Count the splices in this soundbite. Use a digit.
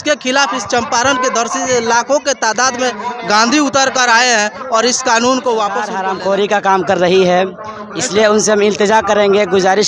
1